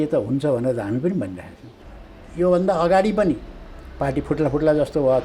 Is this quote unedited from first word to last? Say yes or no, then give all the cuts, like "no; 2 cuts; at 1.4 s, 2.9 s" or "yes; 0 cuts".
no; 1 cut; at 1.7 s